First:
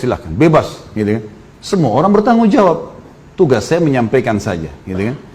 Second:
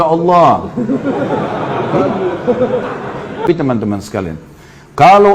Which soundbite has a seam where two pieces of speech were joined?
second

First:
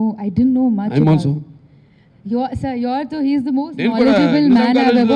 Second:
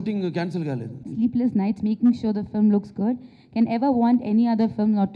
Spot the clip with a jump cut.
second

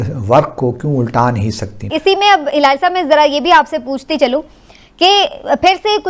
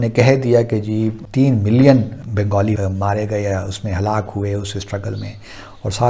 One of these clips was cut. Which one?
first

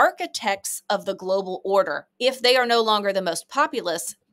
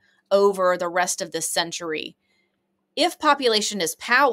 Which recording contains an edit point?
first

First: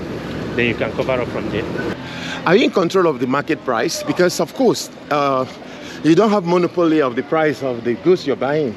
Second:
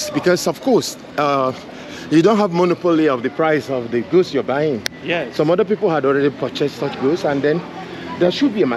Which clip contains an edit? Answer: first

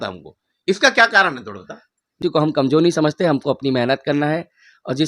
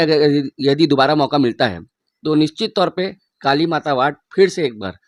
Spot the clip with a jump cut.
first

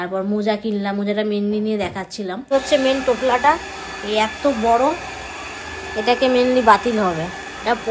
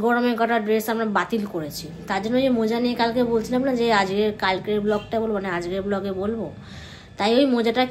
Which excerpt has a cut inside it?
first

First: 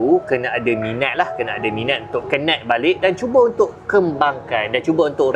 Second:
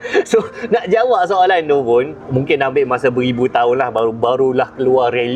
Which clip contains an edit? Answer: second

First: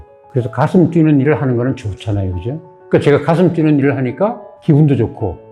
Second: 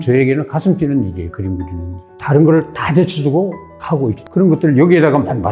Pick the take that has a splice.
second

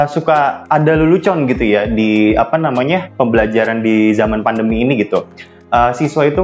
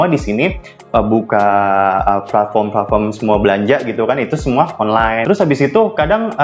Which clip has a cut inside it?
second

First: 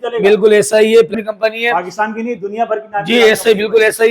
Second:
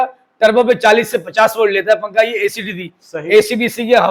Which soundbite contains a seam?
first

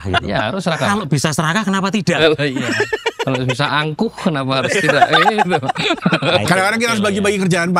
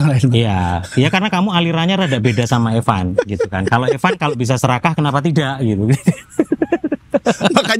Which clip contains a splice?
first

